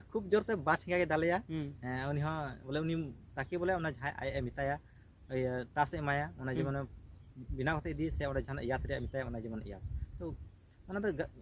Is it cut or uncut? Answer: uncut